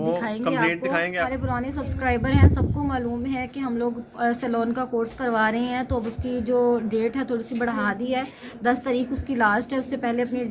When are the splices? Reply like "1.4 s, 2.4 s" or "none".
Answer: 1.2 s